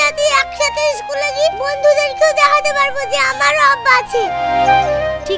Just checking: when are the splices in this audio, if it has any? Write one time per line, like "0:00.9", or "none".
none